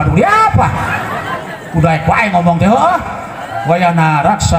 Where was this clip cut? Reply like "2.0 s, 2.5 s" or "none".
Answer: none